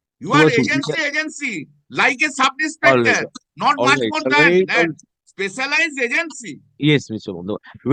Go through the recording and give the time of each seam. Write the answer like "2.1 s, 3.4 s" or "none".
none